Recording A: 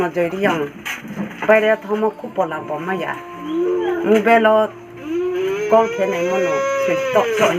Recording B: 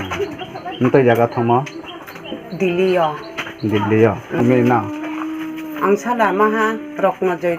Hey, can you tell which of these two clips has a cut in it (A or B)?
B